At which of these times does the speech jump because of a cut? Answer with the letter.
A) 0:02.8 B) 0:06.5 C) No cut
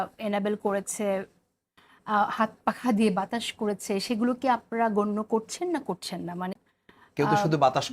B